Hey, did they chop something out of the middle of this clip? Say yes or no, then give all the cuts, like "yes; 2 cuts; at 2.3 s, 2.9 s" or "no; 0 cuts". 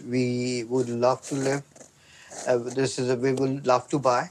no; 0 cuts